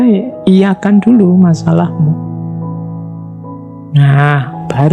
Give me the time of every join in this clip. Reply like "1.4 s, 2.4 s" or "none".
2.1 s, 3.6 s